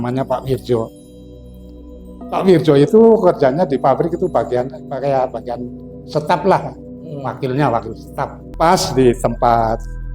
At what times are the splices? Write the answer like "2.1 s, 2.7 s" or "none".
8.4 s